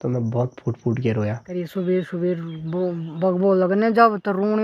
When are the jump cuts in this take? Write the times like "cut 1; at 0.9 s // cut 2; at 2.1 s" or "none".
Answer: cut 1; at 1.5 s